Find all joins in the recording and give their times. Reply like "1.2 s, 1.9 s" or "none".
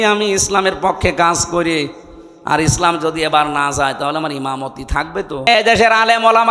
5.5 s